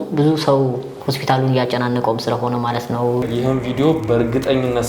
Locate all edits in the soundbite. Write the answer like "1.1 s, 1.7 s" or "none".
3.2 s